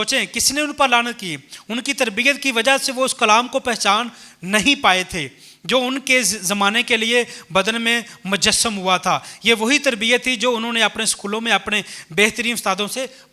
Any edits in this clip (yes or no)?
no